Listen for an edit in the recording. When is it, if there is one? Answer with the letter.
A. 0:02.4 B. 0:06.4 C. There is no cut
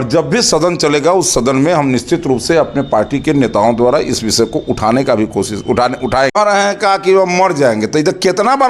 B